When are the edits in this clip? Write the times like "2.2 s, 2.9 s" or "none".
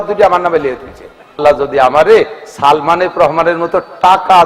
1.4 s

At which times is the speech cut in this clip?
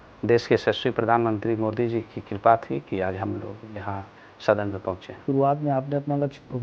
5.2 s

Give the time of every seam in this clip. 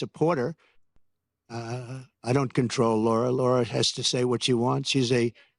0.9 s

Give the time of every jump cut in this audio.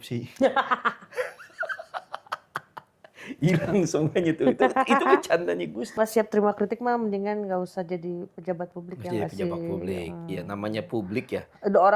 6.0 s

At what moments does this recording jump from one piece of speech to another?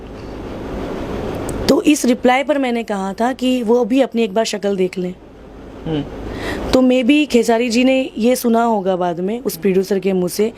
none

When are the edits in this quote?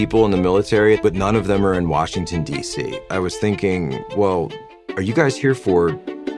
1.0 s, 3.0 s

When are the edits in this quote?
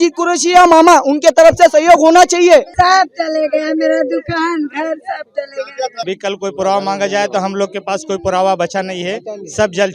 2.7 s, 6.0 s

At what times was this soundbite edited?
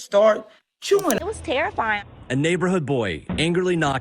1.2 s

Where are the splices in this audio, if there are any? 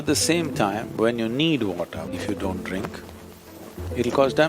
2.1 s

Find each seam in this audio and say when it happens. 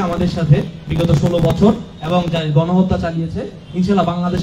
none

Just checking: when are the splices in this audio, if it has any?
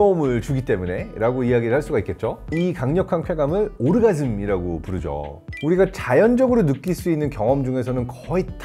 2.5 s, 5.4 s

